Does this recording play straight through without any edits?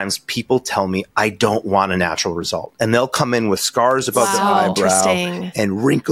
yes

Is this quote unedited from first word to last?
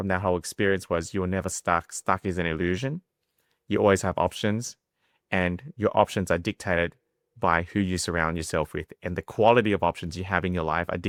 yes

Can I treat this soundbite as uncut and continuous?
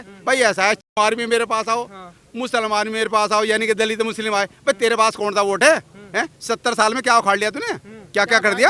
yes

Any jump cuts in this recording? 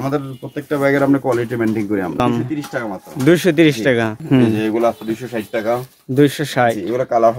yes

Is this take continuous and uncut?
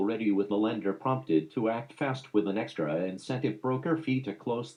yes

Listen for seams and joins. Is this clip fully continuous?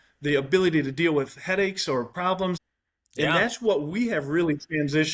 no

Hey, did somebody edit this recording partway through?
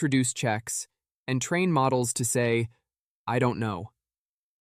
no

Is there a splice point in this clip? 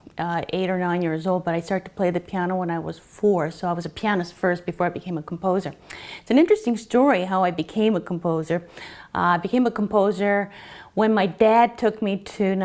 no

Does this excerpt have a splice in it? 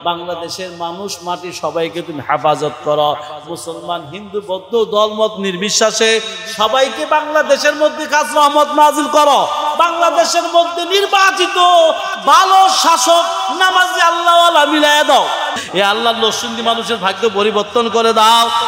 yes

